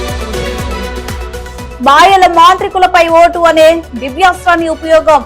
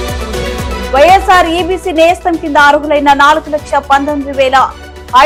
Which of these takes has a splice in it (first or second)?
first